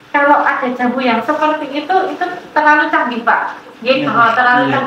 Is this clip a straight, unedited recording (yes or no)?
yes